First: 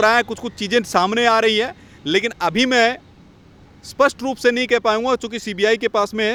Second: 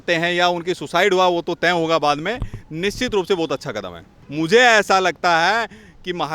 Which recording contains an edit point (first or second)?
second